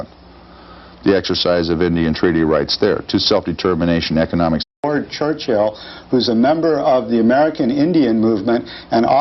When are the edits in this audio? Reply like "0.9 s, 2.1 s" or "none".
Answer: none